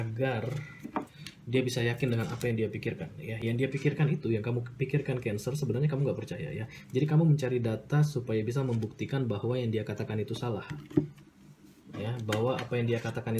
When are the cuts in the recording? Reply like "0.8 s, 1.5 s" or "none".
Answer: none